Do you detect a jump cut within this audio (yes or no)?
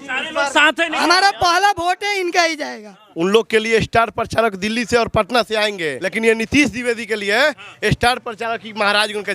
yes